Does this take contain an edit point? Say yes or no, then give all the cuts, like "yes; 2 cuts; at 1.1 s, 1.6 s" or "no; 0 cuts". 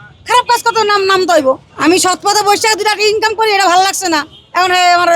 yes; 1 cut; at 1.7 s